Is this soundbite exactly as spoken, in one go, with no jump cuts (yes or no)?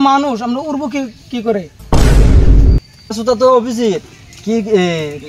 no